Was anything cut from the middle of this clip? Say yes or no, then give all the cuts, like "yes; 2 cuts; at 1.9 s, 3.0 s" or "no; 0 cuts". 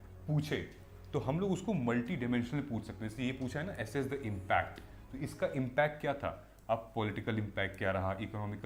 no; 0 cuts